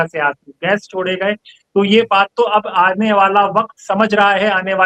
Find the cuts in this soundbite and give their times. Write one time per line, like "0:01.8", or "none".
none